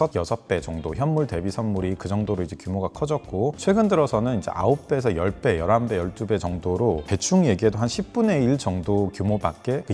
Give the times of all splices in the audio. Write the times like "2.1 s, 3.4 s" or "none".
none